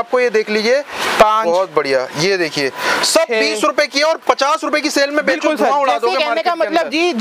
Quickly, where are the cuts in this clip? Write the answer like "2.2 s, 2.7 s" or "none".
none